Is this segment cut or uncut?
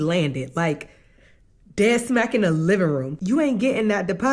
cut